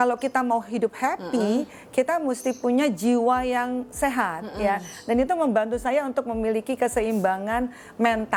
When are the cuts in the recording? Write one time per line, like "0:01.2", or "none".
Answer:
none